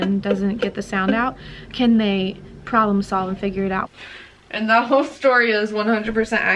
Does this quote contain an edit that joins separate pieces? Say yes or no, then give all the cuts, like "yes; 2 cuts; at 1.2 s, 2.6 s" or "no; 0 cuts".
yes; 1 cut; at 3.9 s